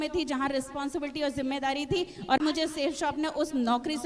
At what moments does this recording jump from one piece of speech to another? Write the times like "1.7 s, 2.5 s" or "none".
2.4 s